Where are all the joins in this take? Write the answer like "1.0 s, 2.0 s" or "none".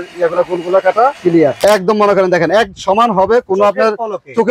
1.6 s